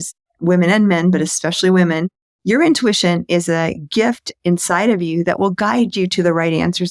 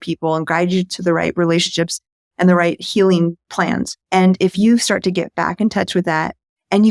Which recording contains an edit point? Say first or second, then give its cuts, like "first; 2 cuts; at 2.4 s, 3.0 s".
second; 1 cut; at 3.5 s